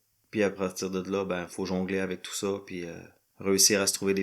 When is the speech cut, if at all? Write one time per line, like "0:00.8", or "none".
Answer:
0:01.5